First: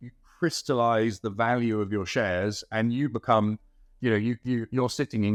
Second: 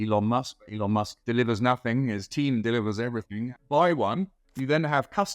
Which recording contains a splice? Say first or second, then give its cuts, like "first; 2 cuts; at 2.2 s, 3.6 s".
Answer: second; 1 cut; at 3.5 s